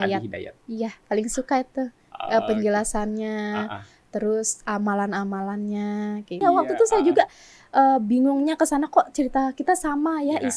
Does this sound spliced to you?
yes; 1 cut; at 6.4 s

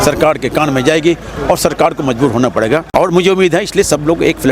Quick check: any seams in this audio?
yes; 1 cut; at 2.9 s

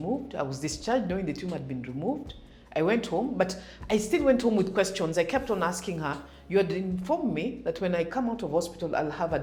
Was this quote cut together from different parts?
no; 0 cuts

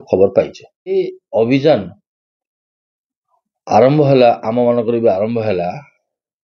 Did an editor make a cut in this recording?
yes; 1 cut; at 1.0 s

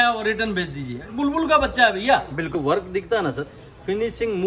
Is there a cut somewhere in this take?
yes; 1 cut; at 2.5 s

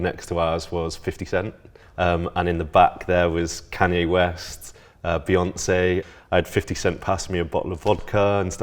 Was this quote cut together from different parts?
yes; 2 cuts; at 1.8 s, 6.1 s

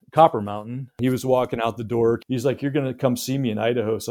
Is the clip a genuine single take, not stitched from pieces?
no; 2 cuts; at 0.9 s, 2.2 s

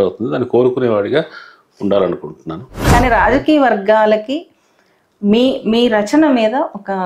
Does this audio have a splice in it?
yes; 1 cut; at 2.8 s

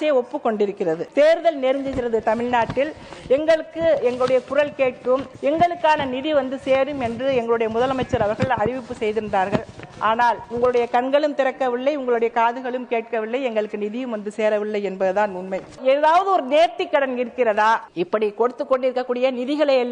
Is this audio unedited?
no; 5 cuts; at 1.0 s, 5.3 s, 10.5 s, 15.8 s, 17.9 s

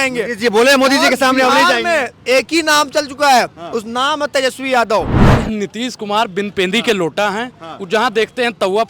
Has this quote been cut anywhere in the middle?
yes; 1 cut; at 5.2 s

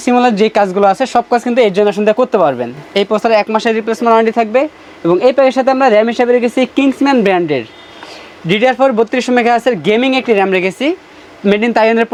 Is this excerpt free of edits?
yes; 0 cuts

